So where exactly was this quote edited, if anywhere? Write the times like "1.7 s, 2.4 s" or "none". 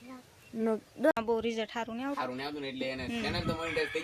1.1 s